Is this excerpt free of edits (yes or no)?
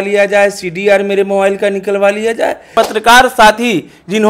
no